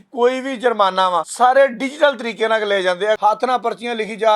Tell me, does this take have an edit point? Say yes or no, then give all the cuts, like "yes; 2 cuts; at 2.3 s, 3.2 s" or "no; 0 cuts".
yes; 2 cuts; at 1.3 s, 3.2 s